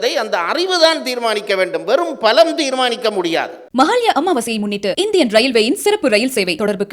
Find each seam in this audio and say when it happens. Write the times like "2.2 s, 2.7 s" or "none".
3.6 s